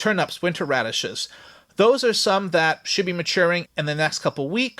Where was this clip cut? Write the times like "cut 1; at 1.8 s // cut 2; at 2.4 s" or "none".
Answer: cut 1; at 3.7 s